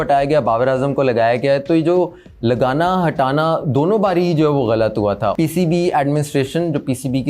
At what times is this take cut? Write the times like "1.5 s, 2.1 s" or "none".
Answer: 5.3 s

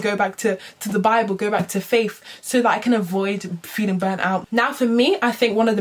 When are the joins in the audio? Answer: 4.5 s

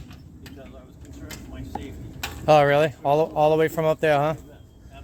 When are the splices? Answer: none

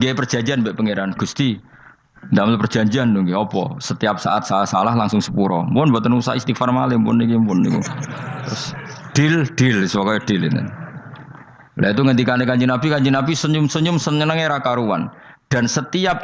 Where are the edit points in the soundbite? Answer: none

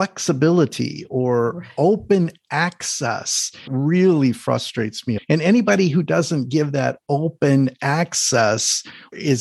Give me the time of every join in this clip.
3.7 s, 5.1 s

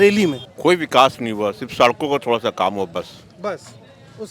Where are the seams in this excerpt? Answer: none

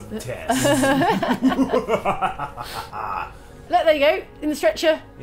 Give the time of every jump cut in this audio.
3.6 s

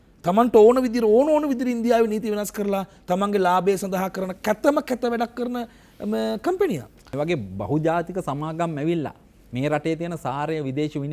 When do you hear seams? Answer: 7.1 s

